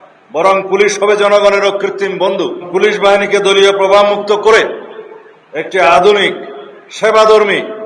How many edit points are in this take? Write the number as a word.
one